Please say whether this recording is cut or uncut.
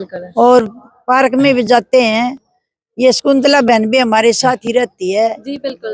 uncut